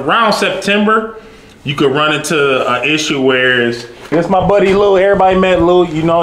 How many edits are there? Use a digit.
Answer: 1